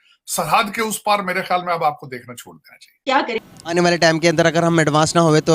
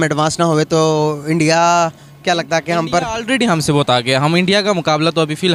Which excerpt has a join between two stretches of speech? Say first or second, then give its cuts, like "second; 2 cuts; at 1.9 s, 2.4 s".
first; 1 cut; at 3.5 s